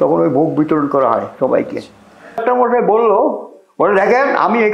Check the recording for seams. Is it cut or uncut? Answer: cut